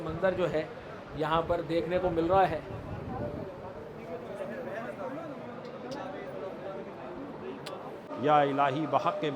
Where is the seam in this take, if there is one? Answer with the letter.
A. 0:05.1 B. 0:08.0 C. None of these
B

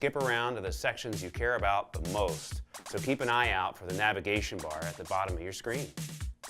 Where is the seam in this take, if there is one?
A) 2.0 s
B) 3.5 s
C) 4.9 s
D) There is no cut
B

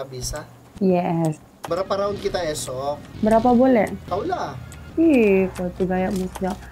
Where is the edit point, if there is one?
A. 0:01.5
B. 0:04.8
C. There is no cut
A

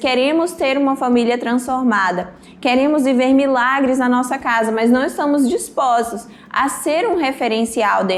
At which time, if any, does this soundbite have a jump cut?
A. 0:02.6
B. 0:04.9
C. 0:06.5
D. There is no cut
D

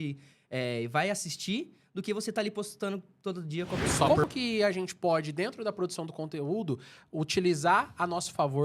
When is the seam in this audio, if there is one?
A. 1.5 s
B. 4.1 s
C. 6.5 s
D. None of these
B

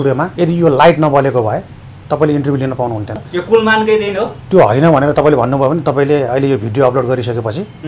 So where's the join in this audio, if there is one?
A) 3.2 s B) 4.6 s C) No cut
A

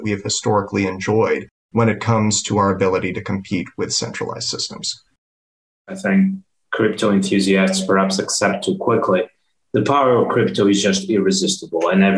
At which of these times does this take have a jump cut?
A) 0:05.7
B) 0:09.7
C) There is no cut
A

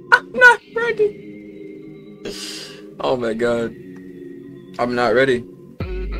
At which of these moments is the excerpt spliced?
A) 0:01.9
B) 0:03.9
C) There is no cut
C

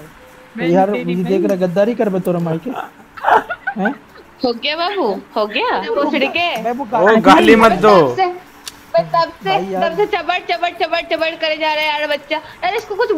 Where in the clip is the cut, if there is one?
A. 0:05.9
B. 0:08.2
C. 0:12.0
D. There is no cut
A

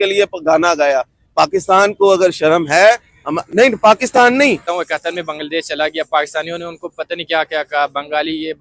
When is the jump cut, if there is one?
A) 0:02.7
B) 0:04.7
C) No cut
B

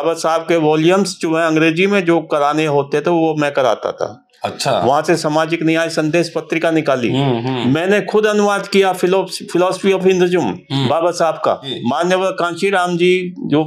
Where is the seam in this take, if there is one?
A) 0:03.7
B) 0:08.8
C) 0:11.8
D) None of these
C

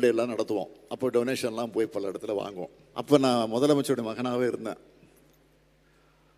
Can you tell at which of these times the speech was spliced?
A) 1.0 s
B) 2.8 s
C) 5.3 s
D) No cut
B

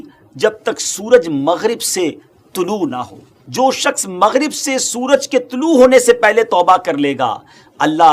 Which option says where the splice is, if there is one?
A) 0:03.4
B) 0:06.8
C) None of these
A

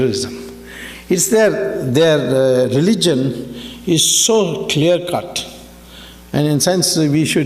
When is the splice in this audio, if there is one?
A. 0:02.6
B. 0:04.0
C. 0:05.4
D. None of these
B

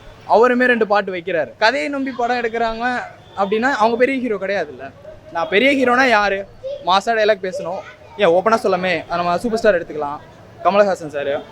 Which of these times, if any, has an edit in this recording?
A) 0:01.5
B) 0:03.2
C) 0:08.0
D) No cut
A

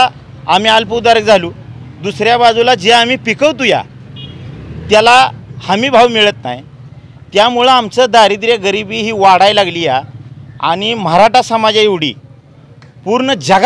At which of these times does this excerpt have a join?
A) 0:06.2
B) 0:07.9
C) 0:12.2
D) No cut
D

